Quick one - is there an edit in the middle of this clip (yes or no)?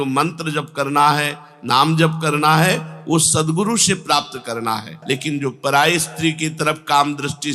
yes